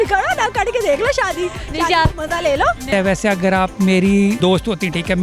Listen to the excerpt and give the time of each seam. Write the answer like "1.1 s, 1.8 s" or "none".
2.8 s, 4.4 s